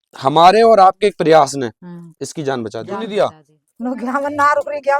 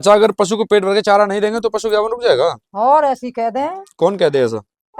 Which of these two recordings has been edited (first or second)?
first